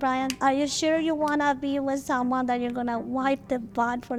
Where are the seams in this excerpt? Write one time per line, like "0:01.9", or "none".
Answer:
none